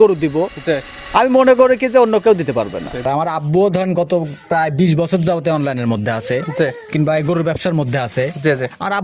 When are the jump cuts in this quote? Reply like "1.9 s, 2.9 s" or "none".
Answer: 3.0 s